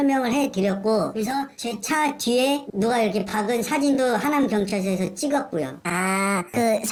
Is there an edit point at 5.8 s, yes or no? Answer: no